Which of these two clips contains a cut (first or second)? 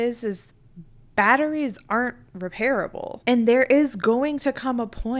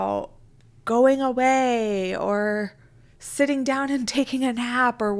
first